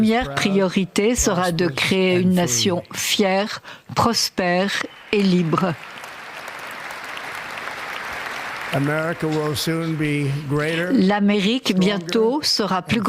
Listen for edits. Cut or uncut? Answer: uncut